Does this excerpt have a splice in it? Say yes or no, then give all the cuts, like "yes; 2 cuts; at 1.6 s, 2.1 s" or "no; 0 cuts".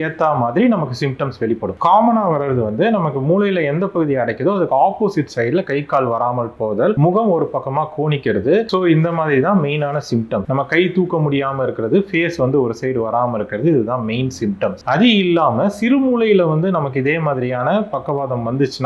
no; 0 cuts